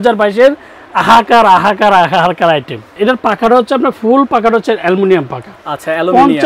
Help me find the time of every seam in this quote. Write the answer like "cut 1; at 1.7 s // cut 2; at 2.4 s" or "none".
cut 1; at 2.9 s

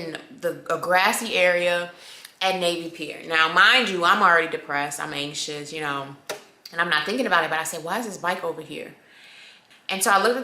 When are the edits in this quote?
cut 1; at 9.5 s

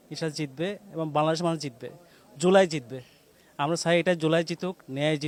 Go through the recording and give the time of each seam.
none

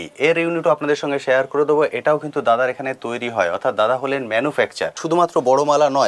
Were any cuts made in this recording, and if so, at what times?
cut 1; at 5.0 s

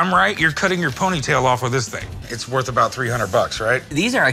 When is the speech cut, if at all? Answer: cut 1; at 2.1 s

